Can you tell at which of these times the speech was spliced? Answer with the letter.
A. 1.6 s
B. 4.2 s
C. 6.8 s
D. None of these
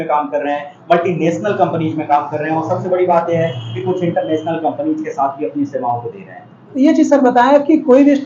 D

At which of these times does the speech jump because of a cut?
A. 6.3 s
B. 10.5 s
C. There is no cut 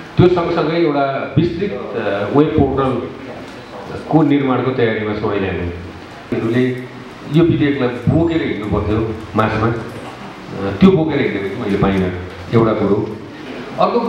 A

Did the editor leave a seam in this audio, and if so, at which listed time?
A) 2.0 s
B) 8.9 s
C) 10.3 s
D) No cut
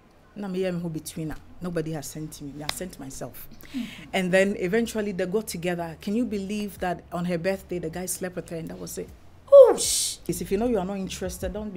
C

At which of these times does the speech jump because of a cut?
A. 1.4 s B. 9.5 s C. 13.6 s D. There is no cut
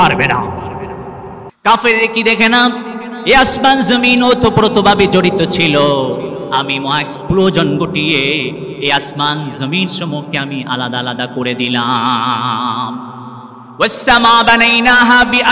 A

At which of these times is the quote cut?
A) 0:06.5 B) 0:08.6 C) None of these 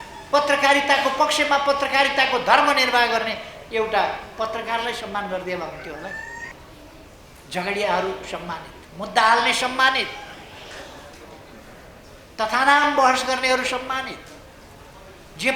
A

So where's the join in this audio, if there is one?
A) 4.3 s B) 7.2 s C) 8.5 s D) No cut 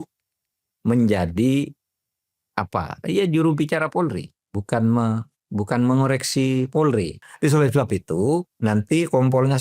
B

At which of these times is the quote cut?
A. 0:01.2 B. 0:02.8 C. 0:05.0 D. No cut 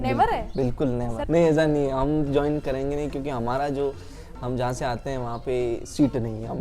A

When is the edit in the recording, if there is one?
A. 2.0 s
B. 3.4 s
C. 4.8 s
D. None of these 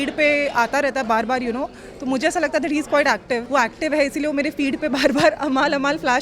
B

